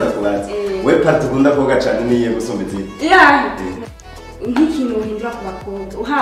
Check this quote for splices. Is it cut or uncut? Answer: cut